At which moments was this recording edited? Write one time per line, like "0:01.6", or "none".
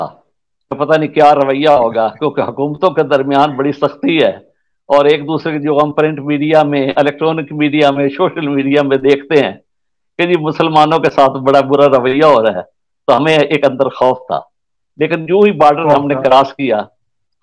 none